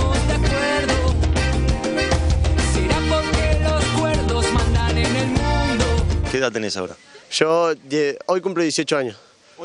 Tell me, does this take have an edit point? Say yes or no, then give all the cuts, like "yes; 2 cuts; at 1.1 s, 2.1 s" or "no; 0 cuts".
yes; 1 cut; at 6.3 s